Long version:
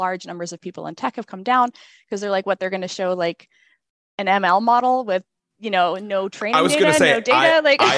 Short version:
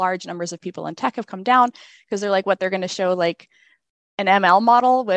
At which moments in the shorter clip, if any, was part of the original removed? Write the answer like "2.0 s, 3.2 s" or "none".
none